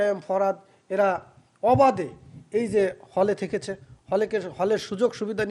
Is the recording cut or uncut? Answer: uncut